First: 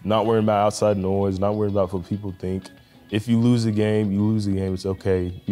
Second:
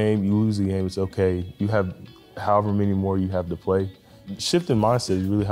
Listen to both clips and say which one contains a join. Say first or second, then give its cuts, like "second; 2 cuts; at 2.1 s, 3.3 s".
second; 1 cut; at 4.2 s